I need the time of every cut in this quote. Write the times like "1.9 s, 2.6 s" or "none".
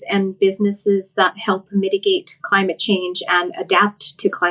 none

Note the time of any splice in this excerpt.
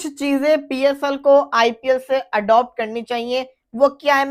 none

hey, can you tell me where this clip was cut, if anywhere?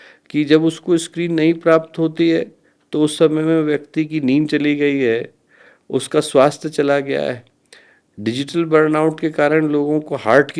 none

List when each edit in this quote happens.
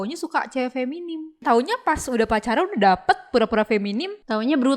1.4 s

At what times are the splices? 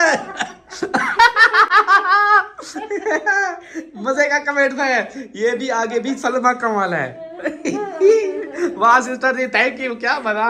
none

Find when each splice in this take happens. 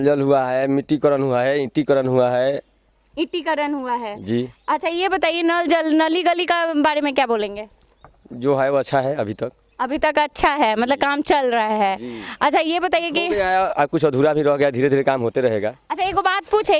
none

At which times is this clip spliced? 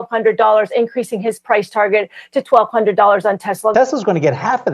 3.7 s

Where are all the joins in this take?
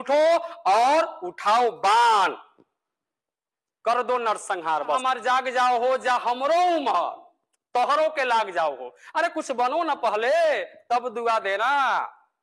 5.0 s

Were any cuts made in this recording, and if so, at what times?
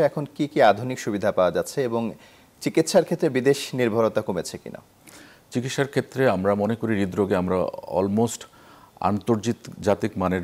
none

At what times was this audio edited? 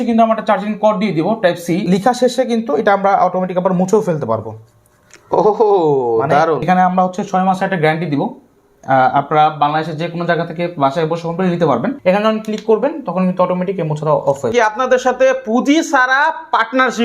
1.8 s, 6.6 s, 12.0 s, 14.5 s

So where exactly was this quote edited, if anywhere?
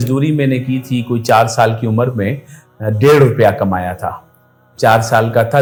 none

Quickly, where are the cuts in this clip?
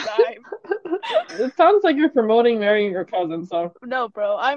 1.3 s

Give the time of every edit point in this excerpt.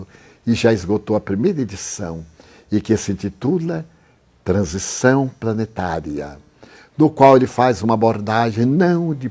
none

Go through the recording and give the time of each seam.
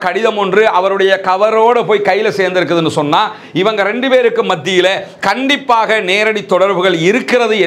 none

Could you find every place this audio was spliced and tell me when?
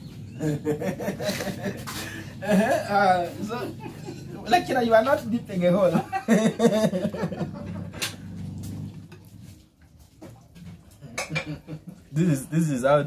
10.5 s

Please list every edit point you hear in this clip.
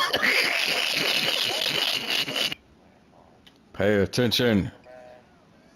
2.5 s

